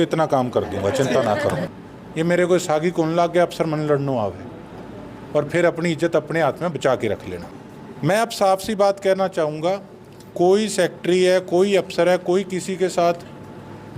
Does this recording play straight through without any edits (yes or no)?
no